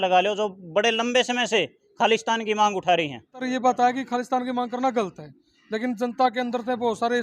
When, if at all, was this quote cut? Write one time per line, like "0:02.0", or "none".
0:03.4